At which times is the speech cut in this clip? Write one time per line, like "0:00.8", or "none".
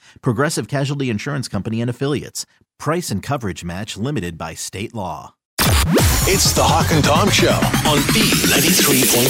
0:05.5